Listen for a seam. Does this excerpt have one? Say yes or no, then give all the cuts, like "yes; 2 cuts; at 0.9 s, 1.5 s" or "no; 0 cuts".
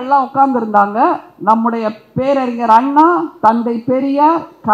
no; 0 cuts